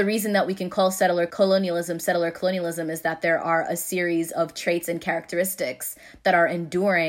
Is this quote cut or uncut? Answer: cut